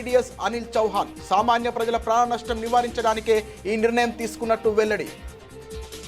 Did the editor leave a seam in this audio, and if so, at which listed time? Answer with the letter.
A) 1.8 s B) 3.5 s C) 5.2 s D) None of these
C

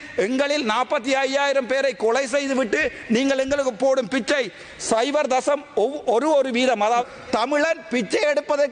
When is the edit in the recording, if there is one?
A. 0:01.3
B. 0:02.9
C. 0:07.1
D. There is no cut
C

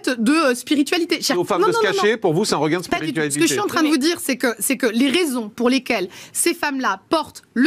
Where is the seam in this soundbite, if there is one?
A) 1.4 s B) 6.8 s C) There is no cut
A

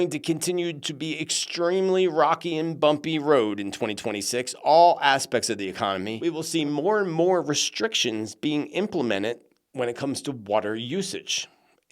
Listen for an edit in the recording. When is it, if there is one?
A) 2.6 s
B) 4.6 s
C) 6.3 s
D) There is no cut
C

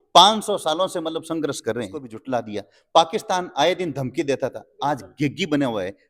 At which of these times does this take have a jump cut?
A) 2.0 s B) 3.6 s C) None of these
A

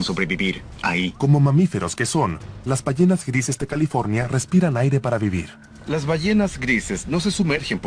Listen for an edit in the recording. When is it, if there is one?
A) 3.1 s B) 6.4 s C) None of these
A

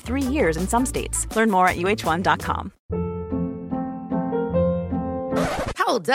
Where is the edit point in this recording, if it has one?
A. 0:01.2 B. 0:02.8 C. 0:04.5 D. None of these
B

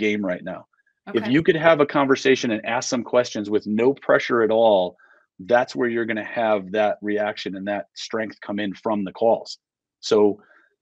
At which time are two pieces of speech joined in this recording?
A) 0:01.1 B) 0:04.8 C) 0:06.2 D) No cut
D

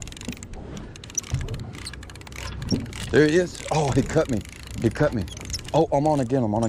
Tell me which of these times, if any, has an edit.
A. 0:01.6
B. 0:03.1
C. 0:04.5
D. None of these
A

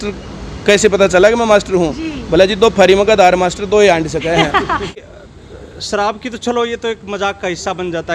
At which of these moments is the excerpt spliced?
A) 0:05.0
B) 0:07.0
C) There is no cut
A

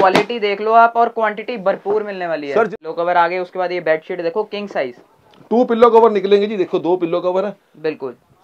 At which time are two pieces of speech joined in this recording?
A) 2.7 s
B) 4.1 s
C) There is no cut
A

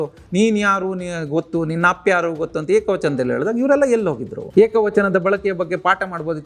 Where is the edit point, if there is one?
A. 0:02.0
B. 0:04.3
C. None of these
B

